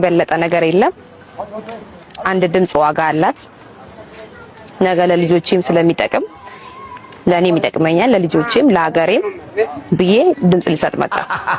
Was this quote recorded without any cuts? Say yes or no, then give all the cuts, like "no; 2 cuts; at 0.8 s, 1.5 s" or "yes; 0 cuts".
yes; 0 cuts